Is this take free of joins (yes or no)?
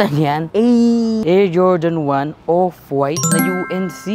yes